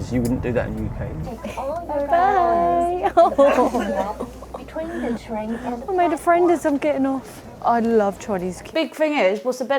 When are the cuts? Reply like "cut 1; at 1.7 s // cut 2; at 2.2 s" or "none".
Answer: cut 1; at 1.1 s // cut 2; at 8.6 s